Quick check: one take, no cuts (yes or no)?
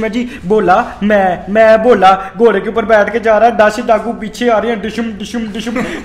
yes